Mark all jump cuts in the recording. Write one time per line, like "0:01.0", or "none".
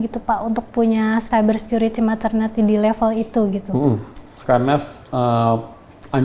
0:01.3
0:04.3